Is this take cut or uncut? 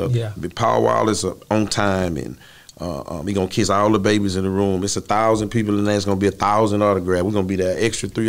uncut